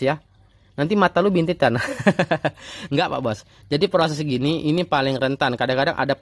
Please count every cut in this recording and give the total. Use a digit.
0